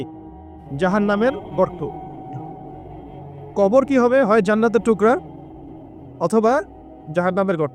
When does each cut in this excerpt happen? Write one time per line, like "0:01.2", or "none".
0:01.9
0:03.6